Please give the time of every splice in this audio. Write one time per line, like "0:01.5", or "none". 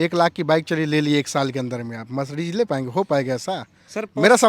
none